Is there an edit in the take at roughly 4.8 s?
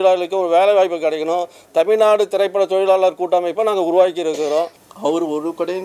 yes; 1 cut; at 4.8 s

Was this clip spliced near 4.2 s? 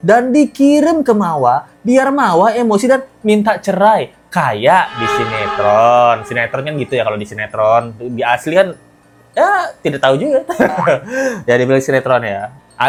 no; 0 cuts

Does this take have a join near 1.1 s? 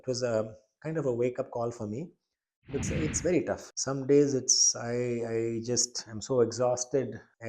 no; 1 cut; at 2.8 s

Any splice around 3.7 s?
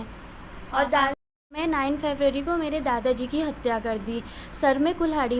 no; 1 cut; at 1.6 s

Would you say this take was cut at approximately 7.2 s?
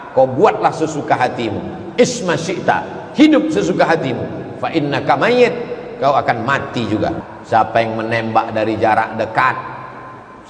yes; 1 cut; at 7.2 s

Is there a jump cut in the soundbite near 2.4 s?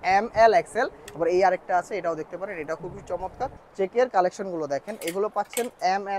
no; 2 cuts; at 1.0 s, 3.6 s

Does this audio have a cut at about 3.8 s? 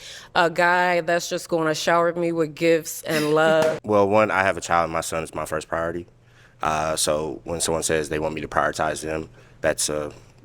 yes; 1 cut; at 3.8 s

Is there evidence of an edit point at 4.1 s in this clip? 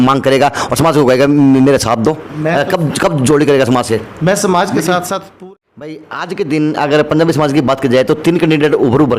no; 1 cut; at 5.3 s

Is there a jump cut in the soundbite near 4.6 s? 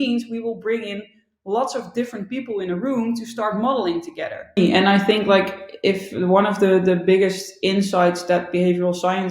yes; 1 cut; at 4.6 s

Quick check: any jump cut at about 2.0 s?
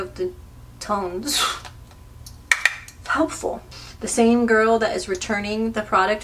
no; 1 cut; at 3.7 s

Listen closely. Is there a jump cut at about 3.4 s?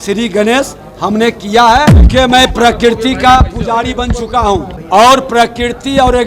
no; 2 cuts; at 2.0 s, 4.8 s

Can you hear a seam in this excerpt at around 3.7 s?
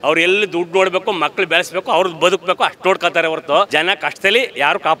yes; 1 cut; at 3.7 s

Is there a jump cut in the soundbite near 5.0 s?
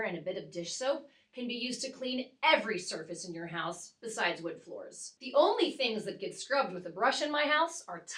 yes; 1 cut; at 5.0 s

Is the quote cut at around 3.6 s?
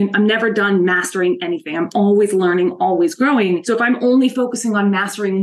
yes; 1 cut; at 3.6 s

